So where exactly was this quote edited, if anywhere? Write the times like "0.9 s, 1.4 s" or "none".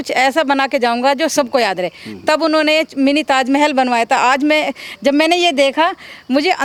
none